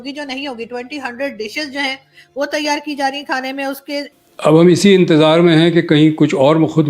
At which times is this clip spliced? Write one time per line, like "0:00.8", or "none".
0:04.1

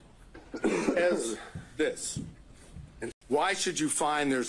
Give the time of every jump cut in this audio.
0:03.2

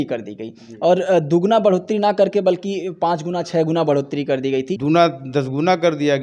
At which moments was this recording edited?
0:04.7

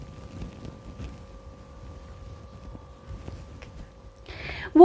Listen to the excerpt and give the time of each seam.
0:03.9

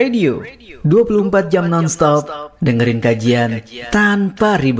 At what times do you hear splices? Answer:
none

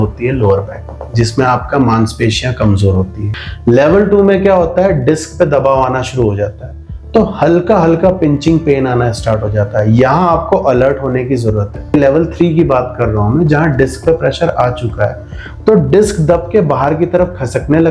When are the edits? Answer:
0:03.2
0:11.9

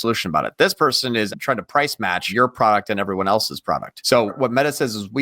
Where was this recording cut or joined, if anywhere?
0:01.3
0:02.3
0:04.3

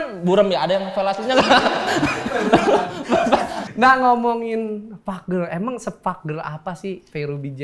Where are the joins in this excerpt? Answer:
none

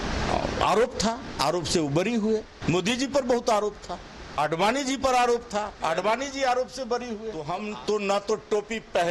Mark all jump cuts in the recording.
0:02.5
0:04.4
0:07.4

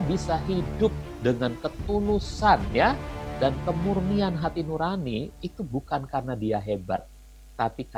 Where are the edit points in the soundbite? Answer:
none

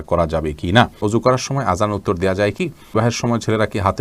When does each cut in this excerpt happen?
0:01.0
0:02.9

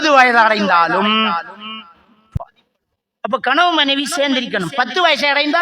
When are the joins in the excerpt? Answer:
0:02.2

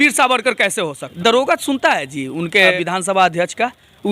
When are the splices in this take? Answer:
0:01.1
0:02.7

